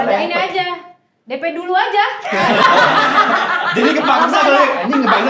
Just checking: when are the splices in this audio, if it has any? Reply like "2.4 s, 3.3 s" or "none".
none